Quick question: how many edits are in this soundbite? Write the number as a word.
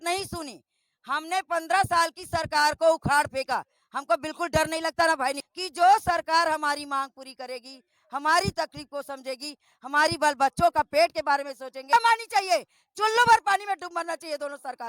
two